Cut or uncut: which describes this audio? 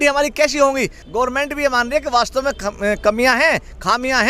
cut